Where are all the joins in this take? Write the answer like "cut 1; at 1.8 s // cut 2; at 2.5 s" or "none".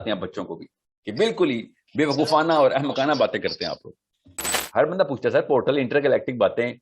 cut 1; at 4.6 s